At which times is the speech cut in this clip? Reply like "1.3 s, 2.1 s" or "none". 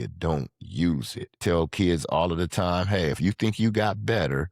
1.3 s